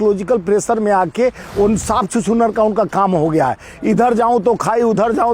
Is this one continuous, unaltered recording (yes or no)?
yes